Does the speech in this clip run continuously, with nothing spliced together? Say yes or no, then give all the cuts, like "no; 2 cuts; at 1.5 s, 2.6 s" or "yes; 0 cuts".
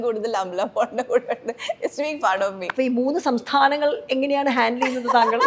no; 1 cut; at 2.6 s